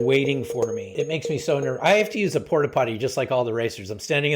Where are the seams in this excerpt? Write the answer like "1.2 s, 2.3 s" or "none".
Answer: 0.9 s